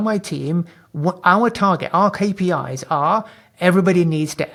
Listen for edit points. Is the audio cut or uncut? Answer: uncut